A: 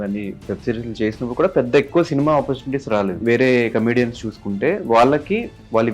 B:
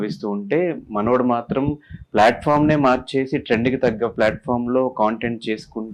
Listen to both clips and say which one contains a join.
A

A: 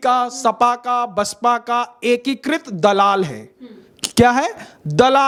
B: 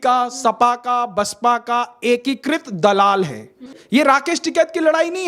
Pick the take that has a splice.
B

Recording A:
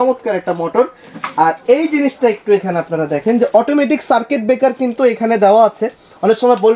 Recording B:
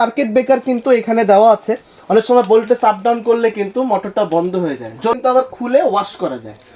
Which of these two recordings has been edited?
B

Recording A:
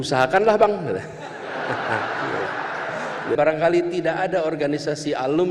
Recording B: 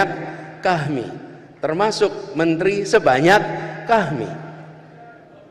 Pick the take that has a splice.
A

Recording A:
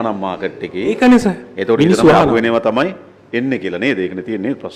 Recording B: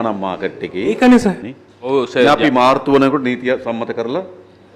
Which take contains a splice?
B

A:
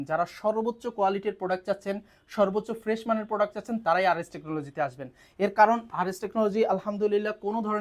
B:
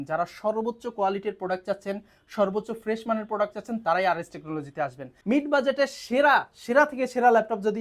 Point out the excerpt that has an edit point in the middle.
B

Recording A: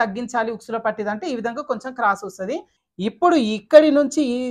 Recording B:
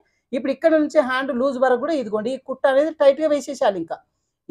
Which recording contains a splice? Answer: A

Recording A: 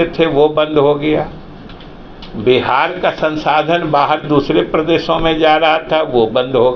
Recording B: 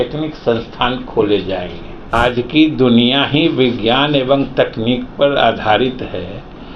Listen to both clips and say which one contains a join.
B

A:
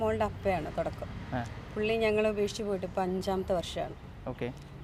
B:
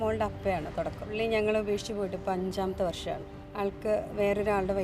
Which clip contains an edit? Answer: B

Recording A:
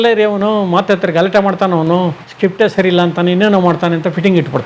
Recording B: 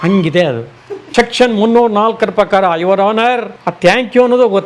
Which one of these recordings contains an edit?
B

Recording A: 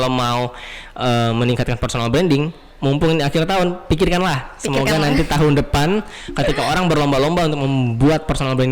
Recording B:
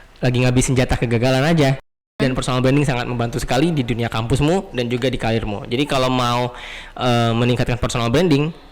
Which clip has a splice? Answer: B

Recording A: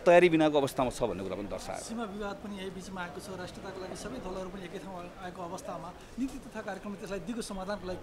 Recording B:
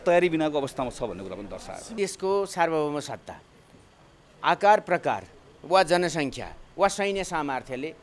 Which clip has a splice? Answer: B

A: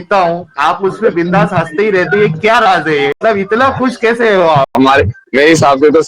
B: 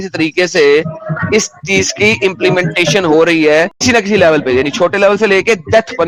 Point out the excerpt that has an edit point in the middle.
A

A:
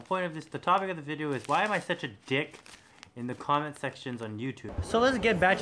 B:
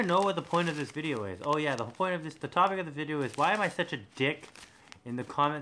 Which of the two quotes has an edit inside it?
A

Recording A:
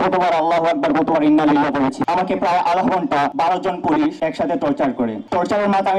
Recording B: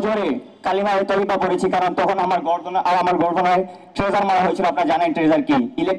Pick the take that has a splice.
A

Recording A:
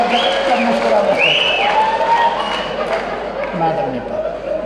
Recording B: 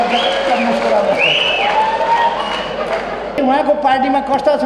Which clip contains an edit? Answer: B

